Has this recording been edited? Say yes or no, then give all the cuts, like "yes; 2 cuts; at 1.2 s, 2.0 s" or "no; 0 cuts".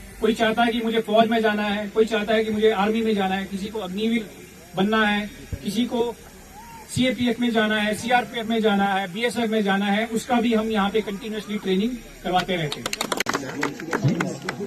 no; 0 cuts